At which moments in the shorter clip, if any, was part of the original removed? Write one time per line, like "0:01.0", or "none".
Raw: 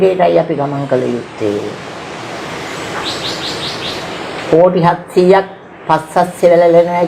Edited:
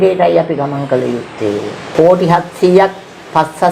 0:01.8